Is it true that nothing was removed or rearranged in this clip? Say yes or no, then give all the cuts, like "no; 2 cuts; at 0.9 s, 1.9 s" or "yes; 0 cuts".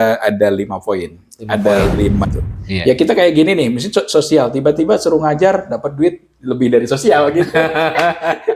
no; 1 cut; at 2.2 s